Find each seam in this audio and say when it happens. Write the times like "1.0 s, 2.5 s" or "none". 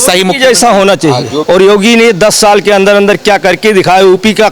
1.3 s